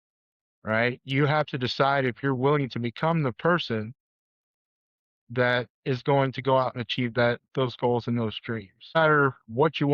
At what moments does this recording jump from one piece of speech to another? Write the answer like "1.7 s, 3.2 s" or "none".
9.0 s